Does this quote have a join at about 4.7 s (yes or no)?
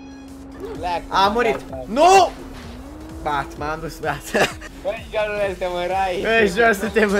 yes